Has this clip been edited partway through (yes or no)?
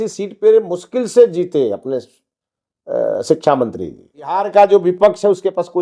yes